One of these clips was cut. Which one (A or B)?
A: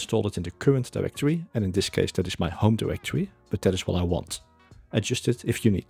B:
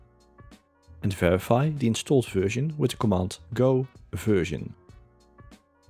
B